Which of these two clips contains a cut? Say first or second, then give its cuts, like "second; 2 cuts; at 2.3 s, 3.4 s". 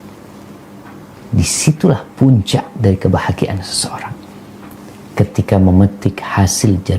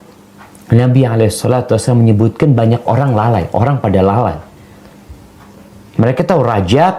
first; 1 cut; at 1.2 s